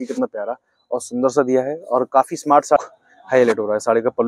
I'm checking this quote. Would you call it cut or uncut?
cut